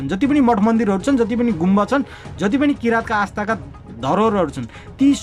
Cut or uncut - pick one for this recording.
uncut